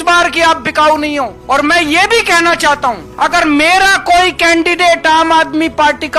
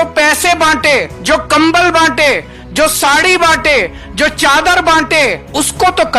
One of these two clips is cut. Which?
second; 1 cut; at 1.1 s

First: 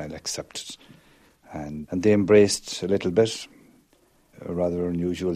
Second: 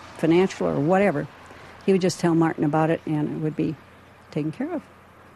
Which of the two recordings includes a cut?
first; 1 cut; at 1.8 s

